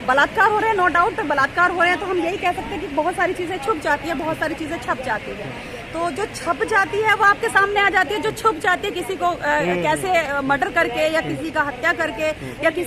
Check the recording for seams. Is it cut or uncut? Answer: uncut